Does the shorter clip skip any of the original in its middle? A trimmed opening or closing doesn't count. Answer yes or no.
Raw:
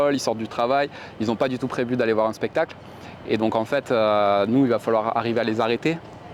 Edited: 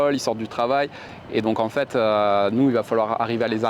yes